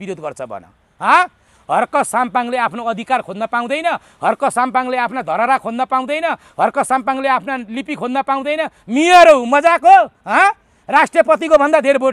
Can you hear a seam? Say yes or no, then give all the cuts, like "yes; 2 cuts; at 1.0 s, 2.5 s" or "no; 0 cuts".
no; 0 cuts